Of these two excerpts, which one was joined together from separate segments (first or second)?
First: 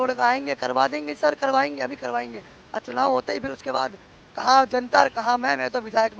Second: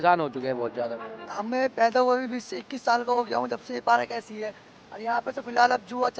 second